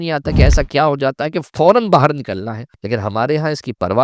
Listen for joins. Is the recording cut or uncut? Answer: cut